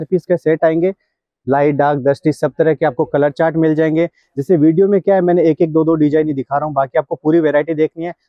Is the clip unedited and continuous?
yes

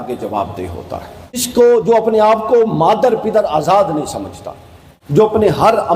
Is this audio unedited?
no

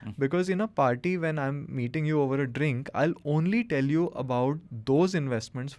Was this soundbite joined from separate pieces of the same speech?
no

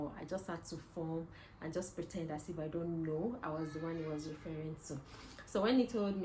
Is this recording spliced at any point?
no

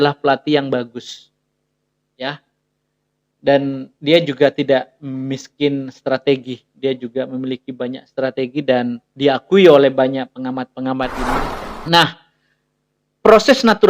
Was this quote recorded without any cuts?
no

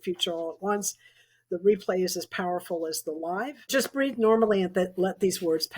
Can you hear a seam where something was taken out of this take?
yes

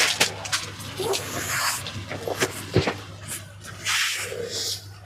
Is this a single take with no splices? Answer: yes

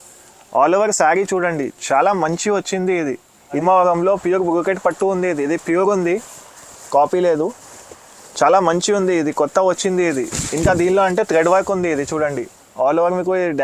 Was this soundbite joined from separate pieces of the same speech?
yes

